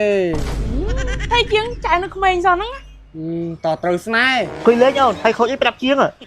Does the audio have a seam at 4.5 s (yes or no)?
yes